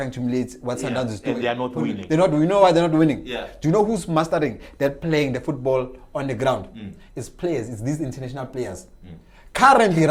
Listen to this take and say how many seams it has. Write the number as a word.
zero